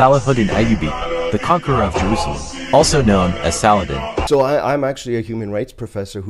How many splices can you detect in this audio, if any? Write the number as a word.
one